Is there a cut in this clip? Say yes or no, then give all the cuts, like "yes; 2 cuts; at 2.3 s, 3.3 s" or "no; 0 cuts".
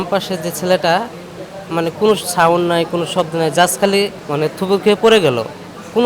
no; 0 cuts